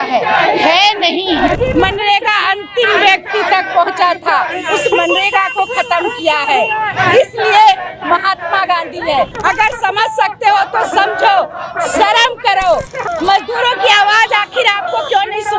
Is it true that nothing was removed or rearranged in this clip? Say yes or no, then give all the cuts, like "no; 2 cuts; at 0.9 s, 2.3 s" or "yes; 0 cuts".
no; 3 cuts; at 1.6 s, 9.3 s, 13.0 s